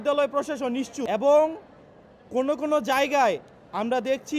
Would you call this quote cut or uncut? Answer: cut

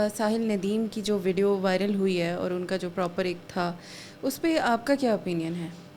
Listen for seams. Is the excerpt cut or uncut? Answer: uncut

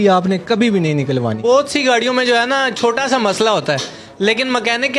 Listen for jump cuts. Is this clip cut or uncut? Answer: cut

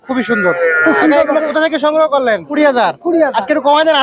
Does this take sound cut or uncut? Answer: cut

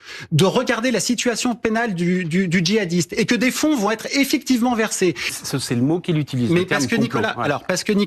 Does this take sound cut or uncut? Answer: cut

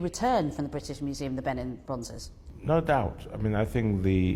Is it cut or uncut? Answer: uncut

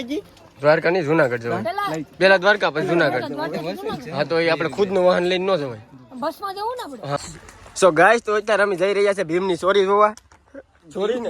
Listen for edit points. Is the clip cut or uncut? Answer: cut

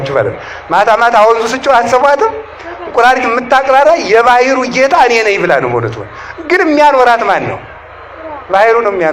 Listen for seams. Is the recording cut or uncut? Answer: uncut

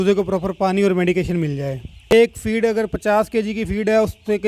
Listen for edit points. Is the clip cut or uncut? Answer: cut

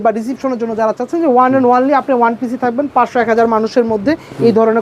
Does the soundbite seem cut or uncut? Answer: uncut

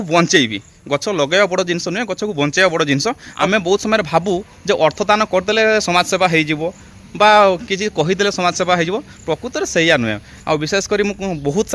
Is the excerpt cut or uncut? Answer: cut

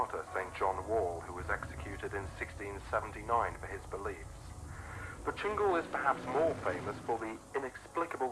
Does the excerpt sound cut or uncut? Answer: uncut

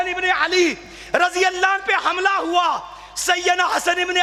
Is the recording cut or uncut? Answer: uncut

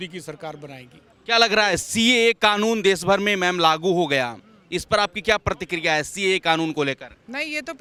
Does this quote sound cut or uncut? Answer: uncut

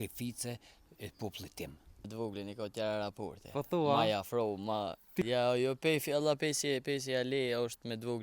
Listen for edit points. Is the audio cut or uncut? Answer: cut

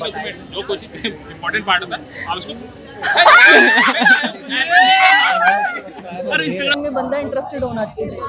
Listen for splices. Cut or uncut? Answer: cut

